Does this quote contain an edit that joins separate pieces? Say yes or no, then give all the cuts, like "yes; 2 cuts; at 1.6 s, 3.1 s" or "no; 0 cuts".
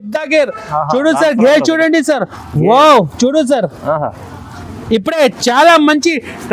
no; 0 cuts